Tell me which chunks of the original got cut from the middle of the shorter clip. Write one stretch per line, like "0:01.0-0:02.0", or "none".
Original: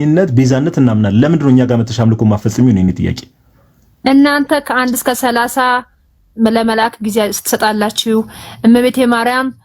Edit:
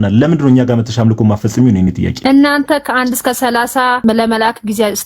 0:03.1-0:03.9
0:05.8-0:06.4